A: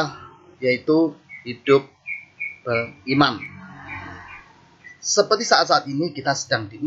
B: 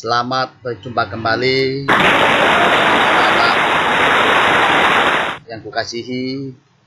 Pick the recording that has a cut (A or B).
B